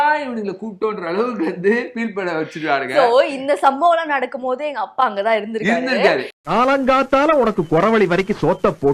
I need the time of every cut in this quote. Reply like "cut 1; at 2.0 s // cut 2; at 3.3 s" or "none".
none